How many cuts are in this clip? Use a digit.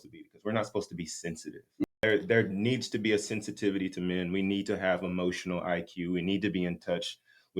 1